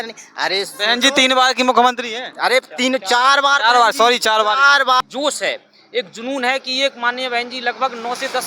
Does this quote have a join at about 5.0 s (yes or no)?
yes